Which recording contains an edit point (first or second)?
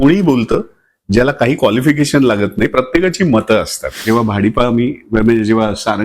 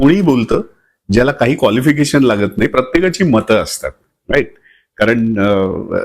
first